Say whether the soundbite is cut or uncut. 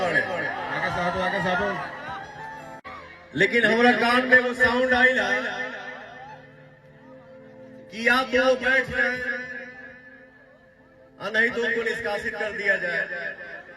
cut